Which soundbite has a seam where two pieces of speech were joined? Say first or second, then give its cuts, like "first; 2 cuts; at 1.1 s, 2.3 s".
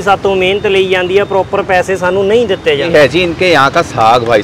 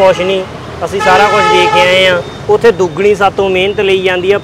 first; 1 cut; at 2.9 s